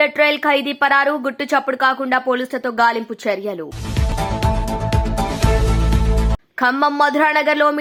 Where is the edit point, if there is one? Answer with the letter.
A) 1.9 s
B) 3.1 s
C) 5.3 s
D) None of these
D